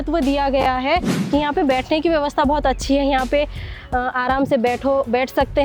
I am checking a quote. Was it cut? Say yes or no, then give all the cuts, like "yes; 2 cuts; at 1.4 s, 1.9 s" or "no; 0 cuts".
yes; 1 cut; at 1.1 s